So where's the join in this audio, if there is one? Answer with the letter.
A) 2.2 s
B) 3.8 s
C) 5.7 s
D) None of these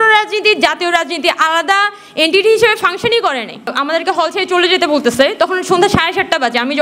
B